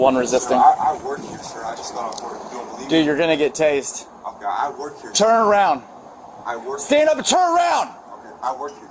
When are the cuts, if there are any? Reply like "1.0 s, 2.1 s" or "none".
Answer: 2.5 s, 6.2 s